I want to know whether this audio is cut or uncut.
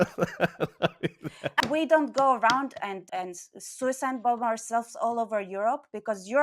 cut